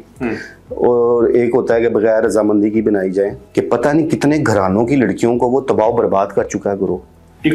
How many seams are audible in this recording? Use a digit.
1